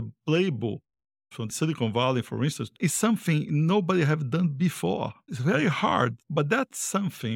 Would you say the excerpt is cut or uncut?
cut